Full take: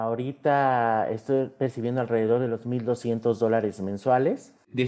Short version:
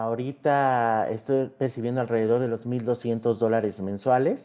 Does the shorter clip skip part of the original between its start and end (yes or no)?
no